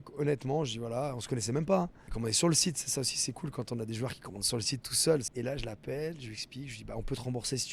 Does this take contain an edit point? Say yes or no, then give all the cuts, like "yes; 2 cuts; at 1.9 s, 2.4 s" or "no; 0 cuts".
yes; 2 cuts; at 2.0 s, 5.3 s